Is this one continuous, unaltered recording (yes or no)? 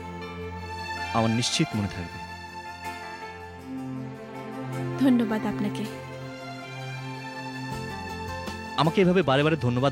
yes